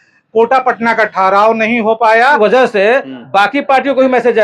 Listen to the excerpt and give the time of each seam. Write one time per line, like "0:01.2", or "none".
0:02.4